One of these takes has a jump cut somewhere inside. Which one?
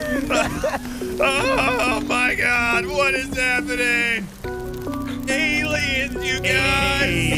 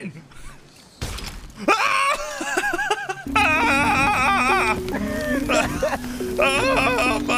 second; 1 cut; at 3.2 s

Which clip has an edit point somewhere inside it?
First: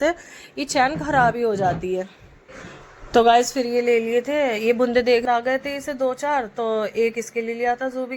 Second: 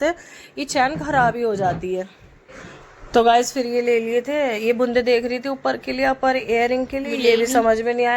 first; 1 cut; at 5.2 s

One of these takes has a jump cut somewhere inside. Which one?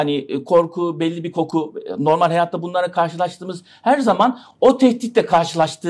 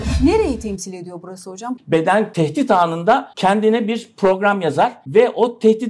second; 4 cuts; at 1.6 s, 2.3 s, 3.3 s, 5.0 s

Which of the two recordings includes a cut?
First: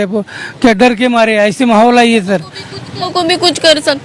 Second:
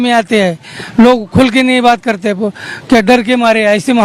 first; 1 cut; at 3.1 s

